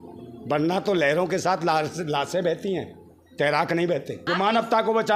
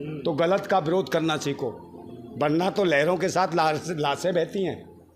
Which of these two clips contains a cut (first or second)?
first